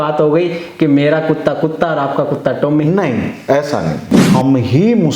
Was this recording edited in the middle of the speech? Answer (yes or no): yes